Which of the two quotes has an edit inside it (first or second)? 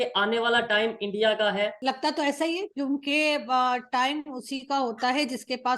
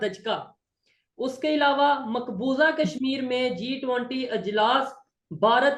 first